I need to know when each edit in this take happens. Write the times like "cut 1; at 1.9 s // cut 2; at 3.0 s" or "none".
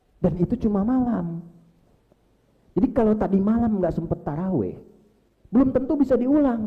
none